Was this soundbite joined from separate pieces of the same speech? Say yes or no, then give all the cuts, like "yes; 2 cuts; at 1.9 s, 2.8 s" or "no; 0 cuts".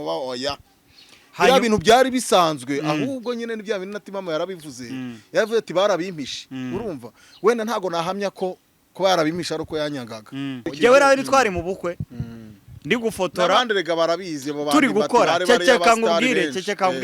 yes; 1 cut; at 10.7 s